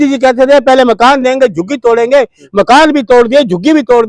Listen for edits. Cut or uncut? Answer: uncut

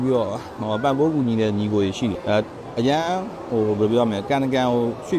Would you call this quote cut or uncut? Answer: cut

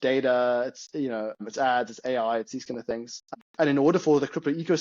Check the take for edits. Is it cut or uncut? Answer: cut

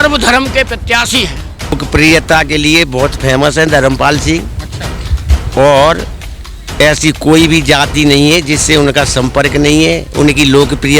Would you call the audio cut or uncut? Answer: cut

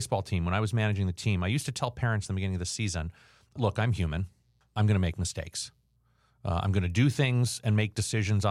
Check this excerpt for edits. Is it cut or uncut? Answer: cut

